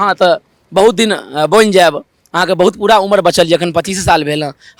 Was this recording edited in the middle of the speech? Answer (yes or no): no